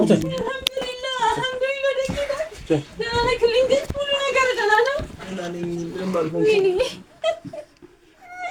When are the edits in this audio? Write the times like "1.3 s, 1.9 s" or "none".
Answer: none